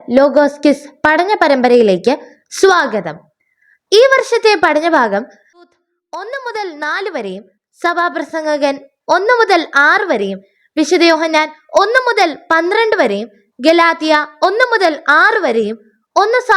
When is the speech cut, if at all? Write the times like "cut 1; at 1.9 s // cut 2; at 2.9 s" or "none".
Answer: cut 1; at 5.6 s